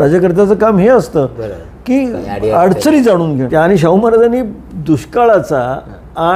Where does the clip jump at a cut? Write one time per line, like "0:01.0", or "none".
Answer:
0:03.5